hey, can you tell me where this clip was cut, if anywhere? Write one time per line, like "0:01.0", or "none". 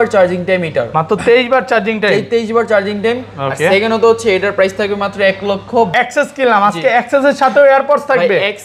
0:05.9